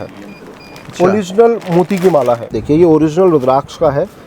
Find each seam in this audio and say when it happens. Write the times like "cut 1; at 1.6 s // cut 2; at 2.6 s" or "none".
cut 1; at 2.6 s